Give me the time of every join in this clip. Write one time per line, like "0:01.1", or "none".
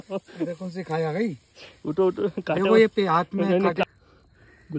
0:03.8